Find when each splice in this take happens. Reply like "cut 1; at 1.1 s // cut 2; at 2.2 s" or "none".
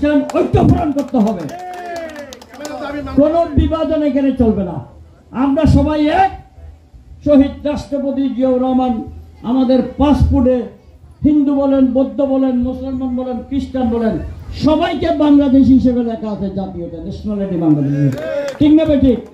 none